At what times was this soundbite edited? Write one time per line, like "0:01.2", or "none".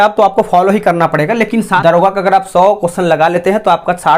0:01.8